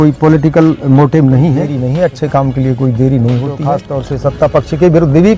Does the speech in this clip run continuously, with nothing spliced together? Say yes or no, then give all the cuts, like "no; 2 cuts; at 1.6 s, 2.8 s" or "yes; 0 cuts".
no; 2 cuts; at 1.8 s, 4.0 s